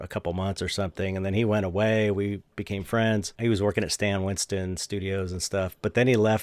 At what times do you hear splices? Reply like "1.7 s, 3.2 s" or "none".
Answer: 3.3 s